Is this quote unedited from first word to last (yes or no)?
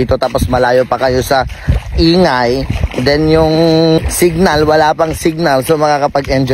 no